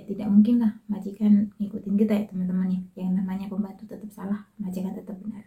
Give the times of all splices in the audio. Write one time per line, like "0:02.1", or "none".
none

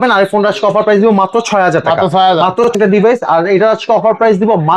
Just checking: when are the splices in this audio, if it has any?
0:02.8

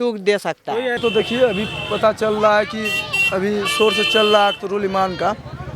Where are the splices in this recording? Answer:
0:01.0

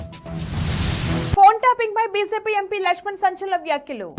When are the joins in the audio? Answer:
0:01.3

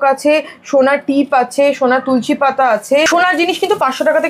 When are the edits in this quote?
none

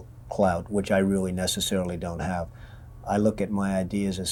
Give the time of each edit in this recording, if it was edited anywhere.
none

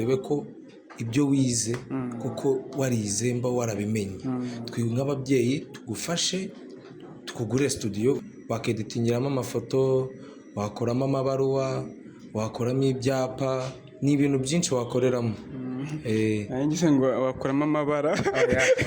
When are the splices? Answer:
0:08.3

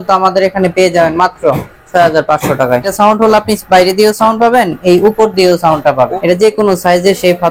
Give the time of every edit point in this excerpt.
0:02.9
0:06.0

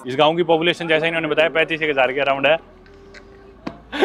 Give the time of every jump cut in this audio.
none

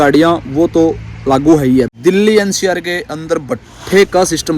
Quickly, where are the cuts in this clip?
0:01.9

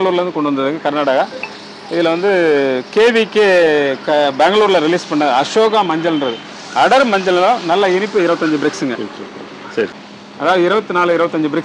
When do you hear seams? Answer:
0:10.1

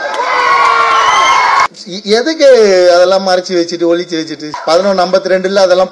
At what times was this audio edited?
0:01.7
0:04.5

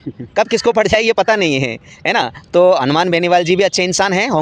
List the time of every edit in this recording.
none

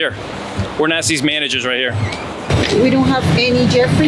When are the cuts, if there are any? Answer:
0:02.4

